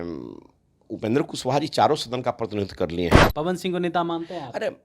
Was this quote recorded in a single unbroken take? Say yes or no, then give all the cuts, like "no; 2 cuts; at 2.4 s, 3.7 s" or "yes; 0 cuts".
no; 1 cut; at 3.2 s